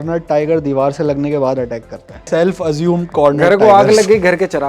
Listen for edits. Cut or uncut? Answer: cut